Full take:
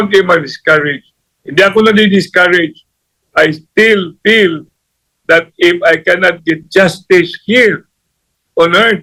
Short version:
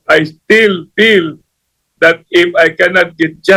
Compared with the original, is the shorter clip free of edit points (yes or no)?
yes